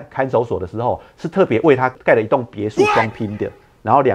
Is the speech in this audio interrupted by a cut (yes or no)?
yes